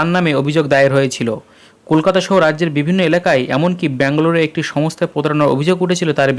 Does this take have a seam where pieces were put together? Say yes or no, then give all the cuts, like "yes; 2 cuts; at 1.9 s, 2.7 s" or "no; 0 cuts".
no; 0 cuts